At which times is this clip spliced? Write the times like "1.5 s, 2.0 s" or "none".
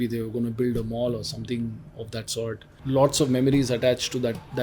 2.8 s